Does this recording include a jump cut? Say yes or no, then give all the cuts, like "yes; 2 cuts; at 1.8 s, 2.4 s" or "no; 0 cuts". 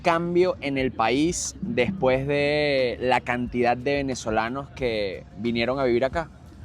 no; 0 cuts